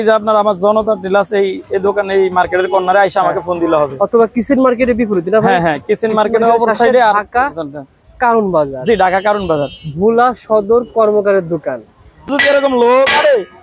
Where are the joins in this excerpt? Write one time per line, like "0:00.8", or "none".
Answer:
0:12.3

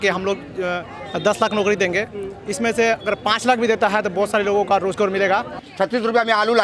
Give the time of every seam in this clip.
0:05.6

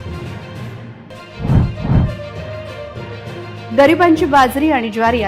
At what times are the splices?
0:01.0

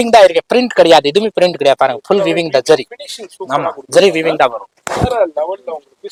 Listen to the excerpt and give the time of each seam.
none

